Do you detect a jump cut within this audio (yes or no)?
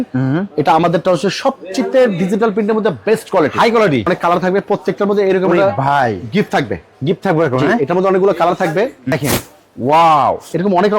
yes